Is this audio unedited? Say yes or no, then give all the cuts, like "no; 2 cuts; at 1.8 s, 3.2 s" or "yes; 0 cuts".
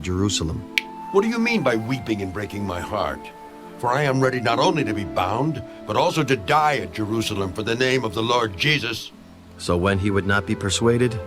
no; 1 cut; at 9.5 s